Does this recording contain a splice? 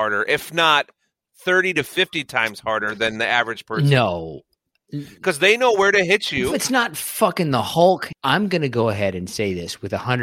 yes; 1 cut; at 8.1 s

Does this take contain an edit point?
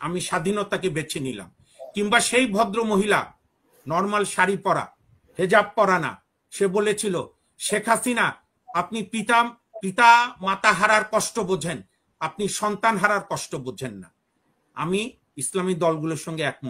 no; 0 cuts

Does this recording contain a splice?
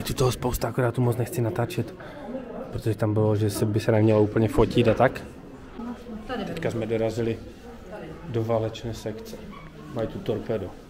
no; 0 cuts

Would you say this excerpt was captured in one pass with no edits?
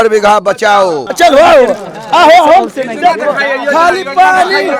no; 1 cut; at 1.0 s

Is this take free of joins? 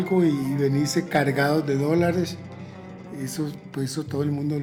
yes; 0 cuts

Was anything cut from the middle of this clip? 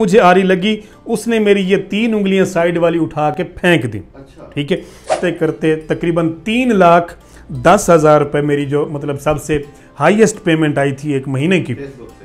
yes; 1 cut; at 5.1 s

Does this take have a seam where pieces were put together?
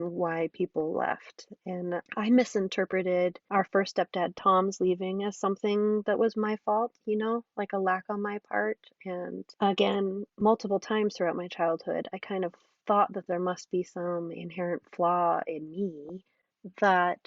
yes; 4 cuts; at 2.1 s, 3.4 s, 9.5 s, 10.3 s

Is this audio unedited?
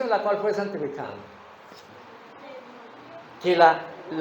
no; 1 cut; at 1.9 s

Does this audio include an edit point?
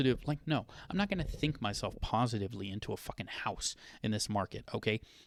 no; 0 cuts

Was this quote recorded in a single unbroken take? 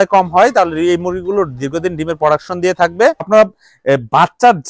no; 1 cut; at 3.3 s

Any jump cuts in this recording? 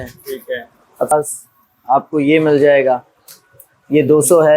yes; 1 cut; at 1.1 s

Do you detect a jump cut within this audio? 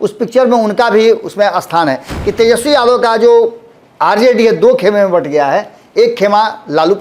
yes; 1 cut; at 2.1 s

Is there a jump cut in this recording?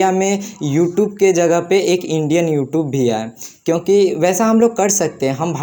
no; 0 cuts

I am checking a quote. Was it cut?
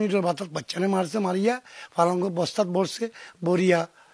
no; 0 cuts

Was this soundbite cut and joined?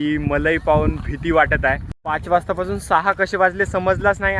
yes; 1 cut; at 1.9 s

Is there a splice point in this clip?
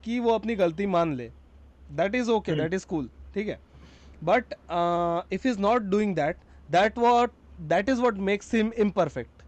no; 0 cuts

